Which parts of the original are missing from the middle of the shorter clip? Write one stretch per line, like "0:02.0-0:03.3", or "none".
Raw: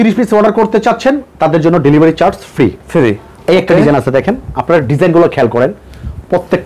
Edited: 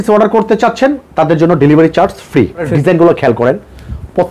0:02.9-0:04.8